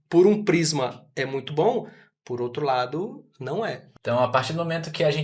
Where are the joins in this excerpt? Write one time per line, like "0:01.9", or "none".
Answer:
0:03.9